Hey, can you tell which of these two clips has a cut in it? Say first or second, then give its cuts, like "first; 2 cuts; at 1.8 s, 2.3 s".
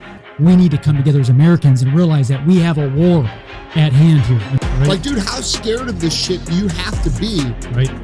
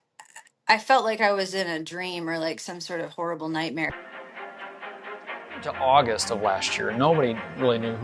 second; 1 cut; at 3.9 s